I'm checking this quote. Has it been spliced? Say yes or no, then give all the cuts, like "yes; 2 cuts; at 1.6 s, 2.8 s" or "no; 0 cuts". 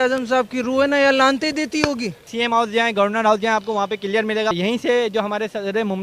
yes; 2 cuts; at 2.3 s, 4.5 s